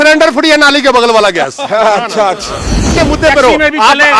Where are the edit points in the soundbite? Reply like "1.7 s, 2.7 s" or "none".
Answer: 3.0 s